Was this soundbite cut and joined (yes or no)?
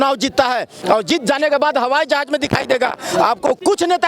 no